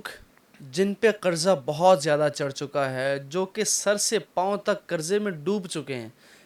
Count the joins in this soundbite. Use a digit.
0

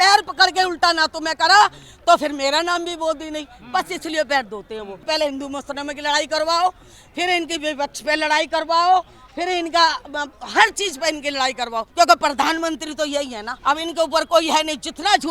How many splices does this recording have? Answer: 3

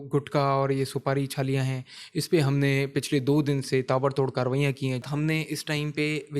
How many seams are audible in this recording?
1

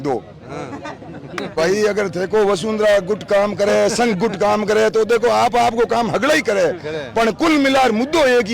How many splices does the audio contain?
1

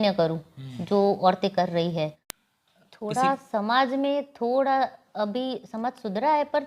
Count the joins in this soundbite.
1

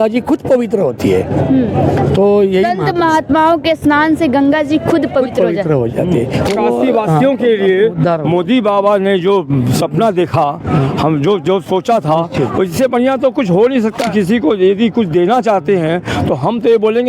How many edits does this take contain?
2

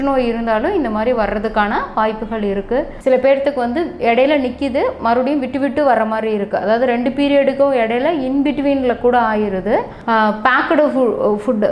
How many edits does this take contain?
2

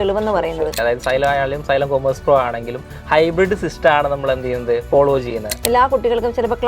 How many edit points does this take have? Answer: 2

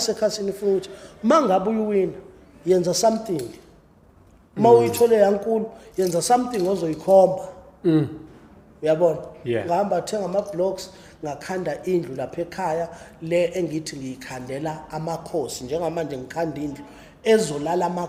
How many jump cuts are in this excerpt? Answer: 0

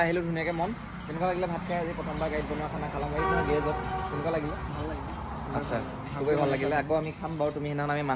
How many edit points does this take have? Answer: 0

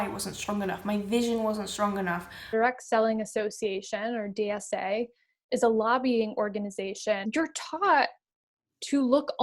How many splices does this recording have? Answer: 2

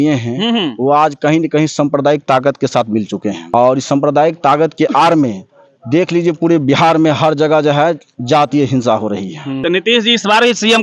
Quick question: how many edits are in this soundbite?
2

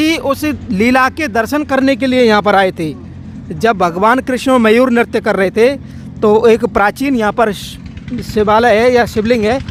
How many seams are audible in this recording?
0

